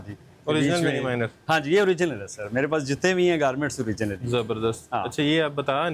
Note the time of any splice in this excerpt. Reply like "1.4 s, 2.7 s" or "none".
none